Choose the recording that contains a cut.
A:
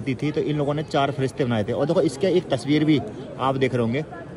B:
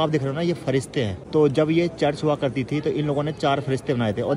B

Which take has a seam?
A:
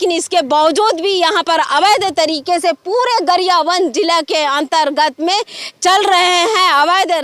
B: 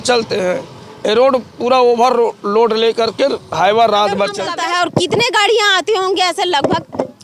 B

